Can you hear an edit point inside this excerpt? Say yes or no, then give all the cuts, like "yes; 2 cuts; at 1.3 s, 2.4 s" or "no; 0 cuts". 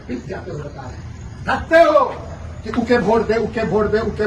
no; 0 cuts